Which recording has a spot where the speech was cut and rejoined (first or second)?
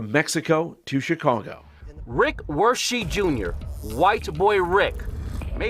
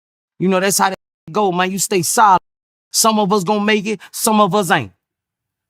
first